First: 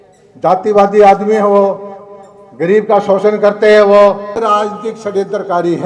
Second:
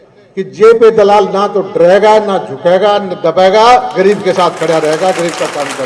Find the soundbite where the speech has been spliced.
first; 1 cut; at 4.4 s

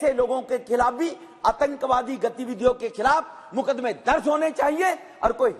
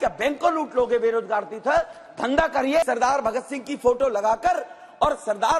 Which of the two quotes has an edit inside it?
second; 1 cut; at 2.8 s

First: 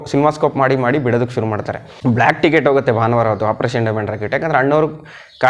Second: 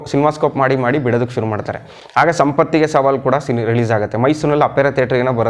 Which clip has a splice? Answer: first; 1 cut; at 1.9 s

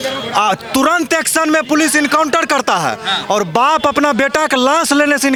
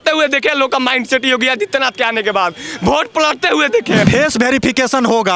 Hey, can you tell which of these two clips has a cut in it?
second; 1 cut; at 4.0 s

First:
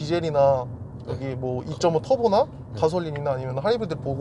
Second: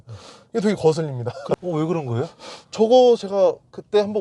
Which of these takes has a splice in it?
second; 1 cut; at 1.5 s

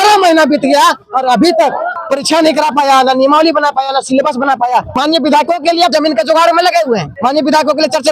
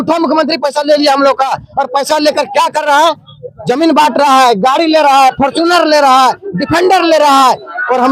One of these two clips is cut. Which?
first; 4 cuts; at 2.0 s, 4.9 s, 5.9 s, 7.1 s

